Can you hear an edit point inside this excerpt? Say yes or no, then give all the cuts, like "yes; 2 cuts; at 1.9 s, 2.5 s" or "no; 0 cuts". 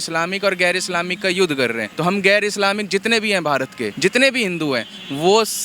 yes; 2 cuts; at 1.9 s, 3.9 s